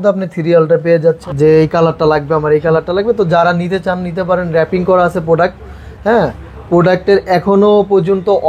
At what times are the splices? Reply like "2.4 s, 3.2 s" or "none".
1.2 s